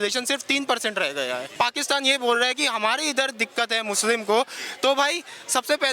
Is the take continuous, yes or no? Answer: no